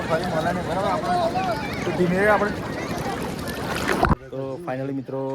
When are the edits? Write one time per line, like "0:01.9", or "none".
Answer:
0:04.3